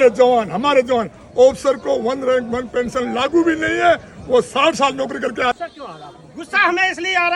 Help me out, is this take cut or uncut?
cut